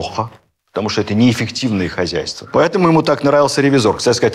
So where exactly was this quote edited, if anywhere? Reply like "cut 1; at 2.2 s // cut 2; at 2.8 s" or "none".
cut 1; at 2.4 s